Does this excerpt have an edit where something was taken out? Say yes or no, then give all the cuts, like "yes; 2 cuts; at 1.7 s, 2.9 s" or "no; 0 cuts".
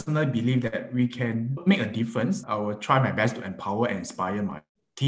yes; 1 cut; at 2.4 s